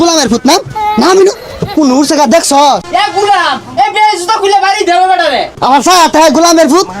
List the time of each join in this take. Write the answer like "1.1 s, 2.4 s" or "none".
2.8 s, 5.5 s